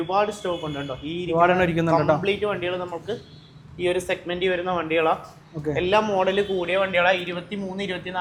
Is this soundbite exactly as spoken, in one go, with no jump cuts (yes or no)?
yes